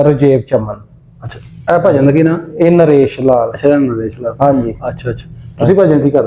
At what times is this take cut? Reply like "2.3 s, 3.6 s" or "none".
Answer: none